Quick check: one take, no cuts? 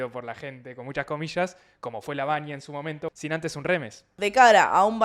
no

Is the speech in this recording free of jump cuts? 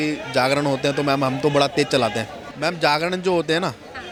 yes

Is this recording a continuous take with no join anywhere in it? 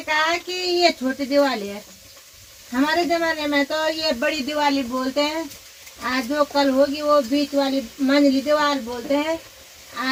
yes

